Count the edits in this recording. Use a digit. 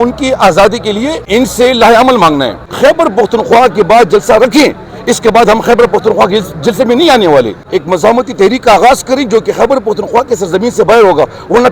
3